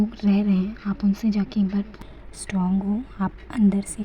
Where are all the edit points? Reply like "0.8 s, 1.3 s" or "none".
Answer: 2.0 s